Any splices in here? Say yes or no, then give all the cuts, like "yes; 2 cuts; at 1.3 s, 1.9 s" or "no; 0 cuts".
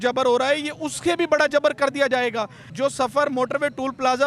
yes; 1 cut; at 2.6 s